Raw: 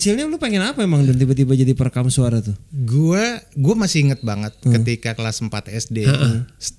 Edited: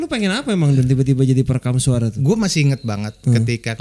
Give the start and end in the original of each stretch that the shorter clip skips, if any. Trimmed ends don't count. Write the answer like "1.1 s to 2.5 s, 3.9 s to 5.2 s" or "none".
2.5 s to 3.5 s